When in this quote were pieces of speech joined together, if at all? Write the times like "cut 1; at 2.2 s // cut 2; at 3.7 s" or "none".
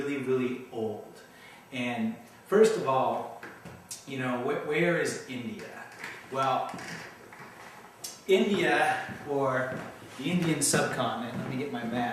cut 1; at 4.5 s